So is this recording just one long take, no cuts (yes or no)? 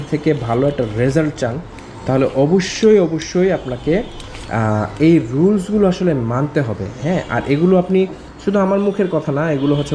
yes